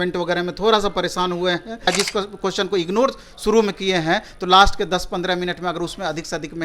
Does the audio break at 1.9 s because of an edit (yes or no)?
yes